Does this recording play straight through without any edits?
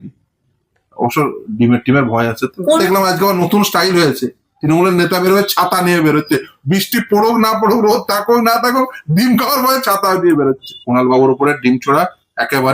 no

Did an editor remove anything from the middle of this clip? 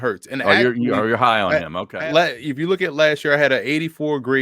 yes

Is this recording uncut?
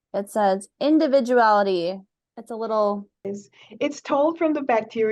no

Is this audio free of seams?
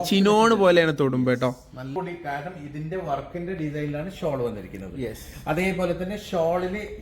no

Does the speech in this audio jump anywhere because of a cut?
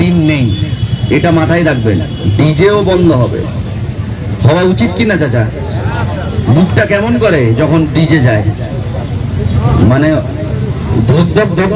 no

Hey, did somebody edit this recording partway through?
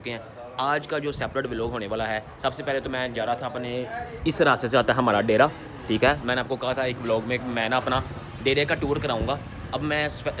no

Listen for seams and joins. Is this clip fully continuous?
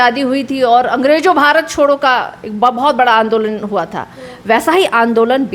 yes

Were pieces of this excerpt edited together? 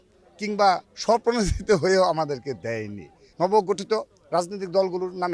yes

